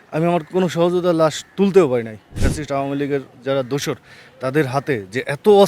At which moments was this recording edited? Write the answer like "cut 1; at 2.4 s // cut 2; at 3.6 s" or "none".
cut 1; at 2.5 s

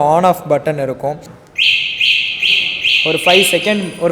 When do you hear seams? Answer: cut 1; at 1.3 s

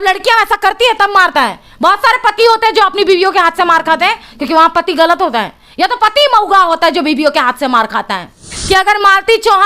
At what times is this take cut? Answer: cut 1; at 8.5 s

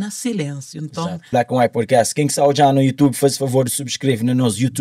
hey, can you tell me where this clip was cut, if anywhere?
cut 1; at 1.2 s

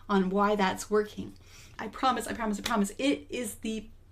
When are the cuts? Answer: cut 1; at 1.7 s

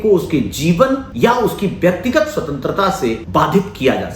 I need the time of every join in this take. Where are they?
cut 1; at 1.1 s // cut 2; at 3.2 s

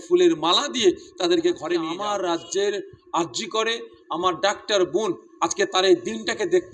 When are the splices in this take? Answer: cut 1; at 2.0 s

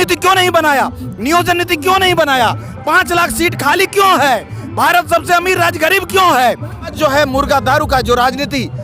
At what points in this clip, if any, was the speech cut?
cut 1; at 6.9 s

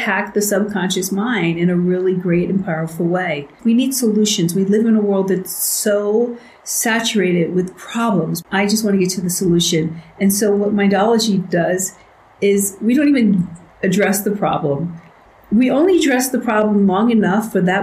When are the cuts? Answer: cut 1; at 3.5 s // cut 2; at 8.4 s

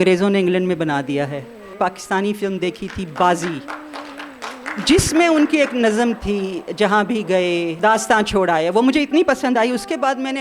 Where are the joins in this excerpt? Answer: cut 1; at 1.7 s // cut 2; at 7.7 s

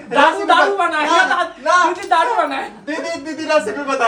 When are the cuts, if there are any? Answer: none

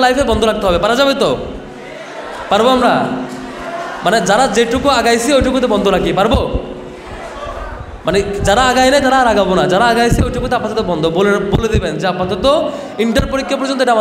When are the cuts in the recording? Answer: none

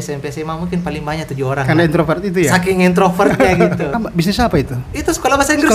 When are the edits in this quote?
cut 1; at 3.9 s

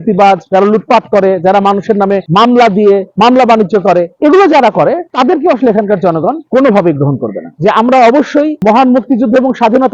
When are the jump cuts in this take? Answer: cut 1; at 4.1 s // cut 2; at 7.5 s

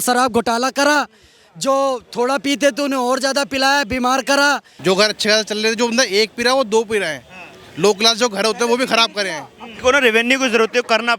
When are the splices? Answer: cut 1; at 4.7 s // cut 2; at 9.7 s

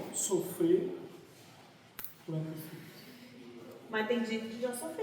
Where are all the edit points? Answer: none

